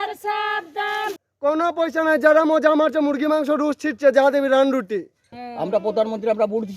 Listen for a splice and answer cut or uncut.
cut